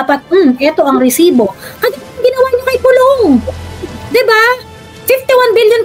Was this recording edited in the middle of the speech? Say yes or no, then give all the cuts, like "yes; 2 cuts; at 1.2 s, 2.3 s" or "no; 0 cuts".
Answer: no; 0 cuts